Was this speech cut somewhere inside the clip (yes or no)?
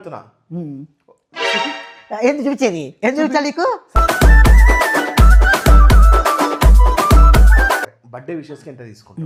no